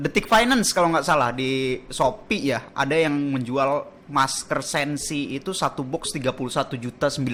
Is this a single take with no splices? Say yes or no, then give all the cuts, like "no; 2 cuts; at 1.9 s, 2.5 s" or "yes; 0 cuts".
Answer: yes; 0 cuts